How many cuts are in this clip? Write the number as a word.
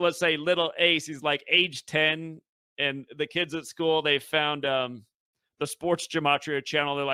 zero